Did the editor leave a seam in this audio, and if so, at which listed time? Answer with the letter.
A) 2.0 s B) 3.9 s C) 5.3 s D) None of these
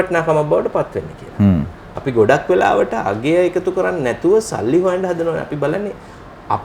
D